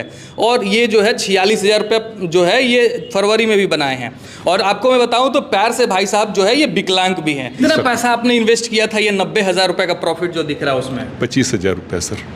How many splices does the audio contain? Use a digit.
1